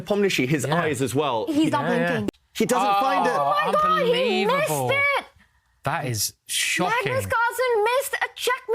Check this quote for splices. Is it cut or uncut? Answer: cut